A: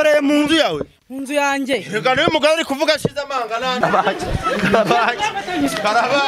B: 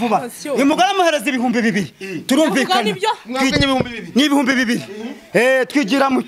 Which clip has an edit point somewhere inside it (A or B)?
A